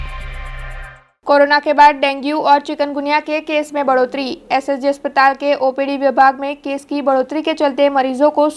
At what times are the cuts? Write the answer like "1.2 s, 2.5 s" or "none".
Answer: 1.1 s